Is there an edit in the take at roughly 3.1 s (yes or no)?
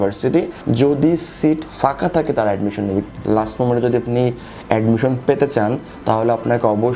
yes